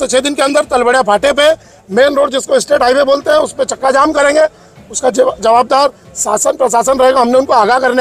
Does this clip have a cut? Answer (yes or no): no